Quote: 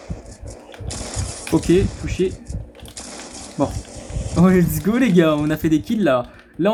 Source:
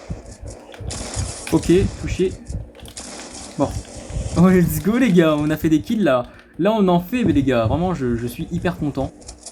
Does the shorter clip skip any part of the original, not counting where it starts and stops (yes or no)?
no